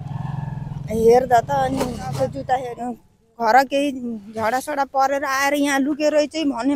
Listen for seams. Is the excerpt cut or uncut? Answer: cut